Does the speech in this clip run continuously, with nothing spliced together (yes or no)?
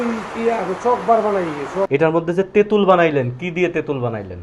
no